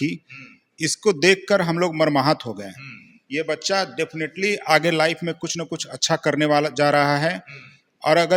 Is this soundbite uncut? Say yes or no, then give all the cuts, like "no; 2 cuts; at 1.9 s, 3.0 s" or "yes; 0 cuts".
yes; 0 cuts